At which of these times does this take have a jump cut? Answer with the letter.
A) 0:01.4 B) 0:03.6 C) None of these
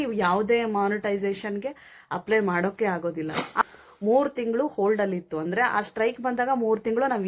B